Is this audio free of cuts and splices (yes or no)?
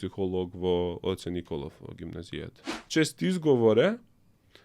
no